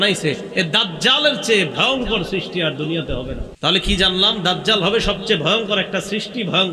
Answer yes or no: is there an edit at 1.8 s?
no